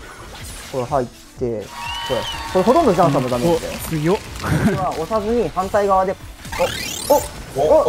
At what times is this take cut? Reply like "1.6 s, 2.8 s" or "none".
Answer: 4.9 s

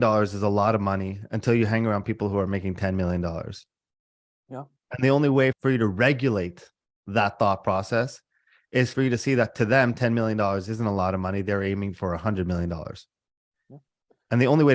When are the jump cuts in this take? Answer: 5.6 s, 8.9 s

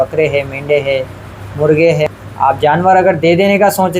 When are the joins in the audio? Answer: 2.2 s

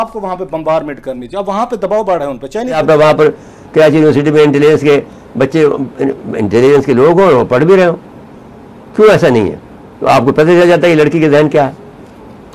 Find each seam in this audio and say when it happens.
2.8 s

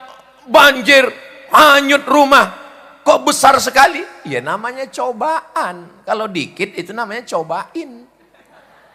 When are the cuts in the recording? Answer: none

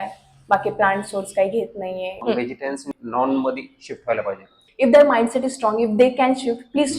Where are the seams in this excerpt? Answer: 2.6 s, 4.6 s

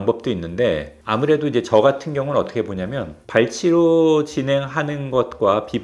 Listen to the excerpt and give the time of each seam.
none

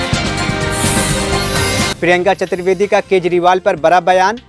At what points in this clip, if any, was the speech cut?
1.9 s

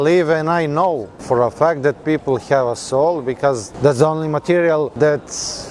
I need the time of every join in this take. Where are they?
1.1 s, 3.7 s, 4.9 s

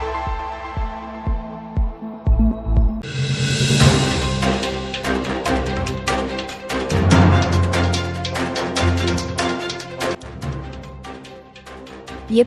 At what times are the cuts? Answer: 3.1 s

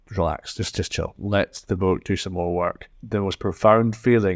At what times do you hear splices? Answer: 1.2 s, 2.9 s

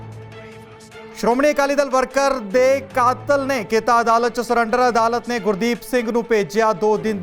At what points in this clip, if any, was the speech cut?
1.2 s

